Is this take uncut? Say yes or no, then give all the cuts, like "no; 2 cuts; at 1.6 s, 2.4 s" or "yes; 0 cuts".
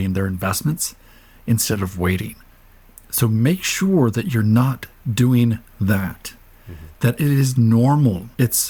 yes; 0 cuts